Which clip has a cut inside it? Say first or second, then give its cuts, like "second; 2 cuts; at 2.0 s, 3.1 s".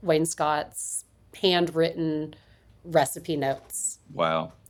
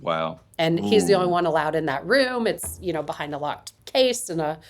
second; 1 cut; at 3.7 s